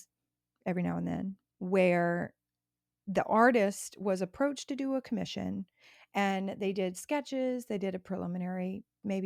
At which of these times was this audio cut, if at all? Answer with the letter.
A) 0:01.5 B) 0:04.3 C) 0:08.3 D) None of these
A